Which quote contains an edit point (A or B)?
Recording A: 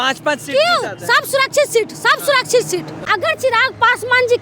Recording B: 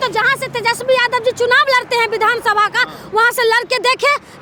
A